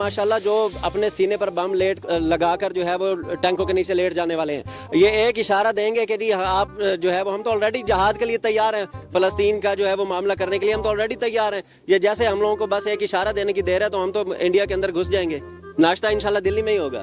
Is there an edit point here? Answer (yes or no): no